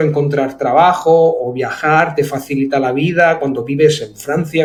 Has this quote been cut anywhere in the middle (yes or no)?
no